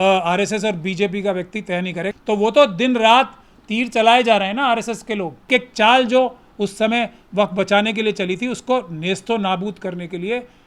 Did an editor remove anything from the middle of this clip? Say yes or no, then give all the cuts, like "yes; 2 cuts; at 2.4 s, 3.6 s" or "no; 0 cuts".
yes; 2 cuts; at 2.1 s, 5.5 s